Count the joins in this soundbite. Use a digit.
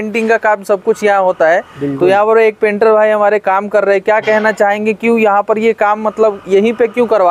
0